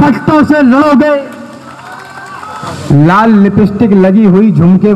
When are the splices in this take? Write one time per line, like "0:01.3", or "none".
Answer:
0:02.6